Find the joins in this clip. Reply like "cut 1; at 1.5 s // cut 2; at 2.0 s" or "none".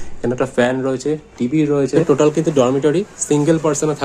cut 1; at 1.9 s

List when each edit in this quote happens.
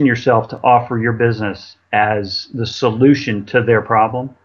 none

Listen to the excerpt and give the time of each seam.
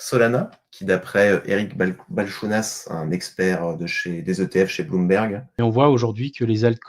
cut 1; at 5.5 s

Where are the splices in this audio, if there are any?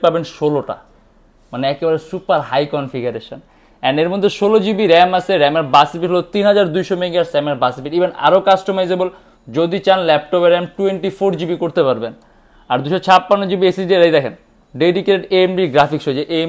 none

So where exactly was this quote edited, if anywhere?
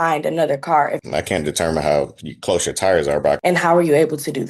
cut 1; at 1.0 s // cut 2; at 3.4 s

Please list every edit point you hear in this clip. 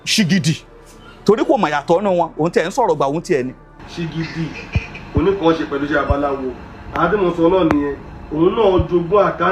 none

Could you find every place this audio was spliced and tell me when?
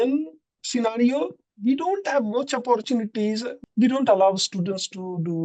cut 1; at 3.5 s

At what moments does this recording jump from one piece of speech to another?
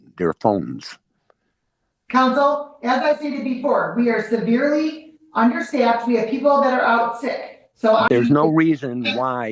cut 1; at 8.1 s

